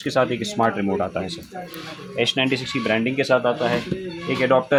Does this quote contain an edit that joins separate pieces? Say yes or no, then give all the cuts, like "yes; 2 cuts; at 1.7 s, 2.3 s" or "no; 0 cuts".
no; 0 cuts